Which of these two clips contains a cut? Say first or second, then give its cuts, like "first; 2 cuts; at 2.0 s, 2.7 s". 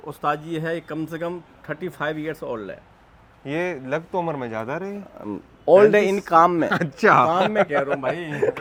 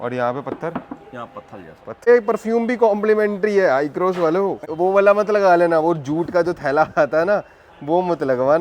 second; 2 cuts; at 2.1 s, 4.7 s